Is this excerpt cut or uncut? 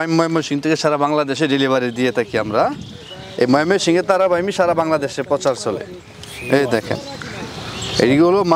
uncut